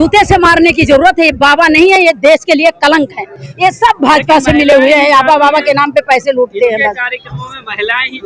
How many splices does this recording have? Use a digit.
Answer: 0